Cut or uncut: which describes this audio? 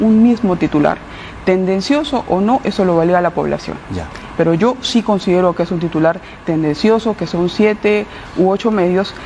uncut